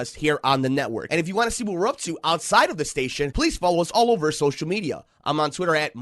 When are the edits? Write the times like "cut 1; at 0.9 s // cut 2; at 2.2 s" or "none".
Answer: cut 1; at 1.0 s